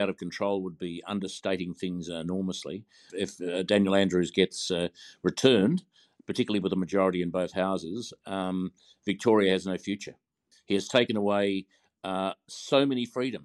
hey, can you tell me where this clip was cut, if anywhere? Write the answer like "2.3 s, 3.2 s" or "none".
3.1 s, 10.6 s